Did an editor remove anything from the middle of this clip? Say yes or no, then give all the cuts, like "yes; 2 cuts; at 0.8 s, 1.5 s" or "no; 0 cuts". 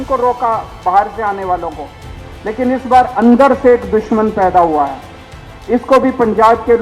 no; 0 cuts